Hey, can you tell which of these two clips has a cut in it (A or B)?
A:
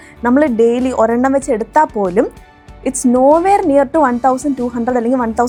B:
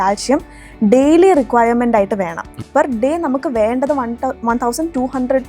B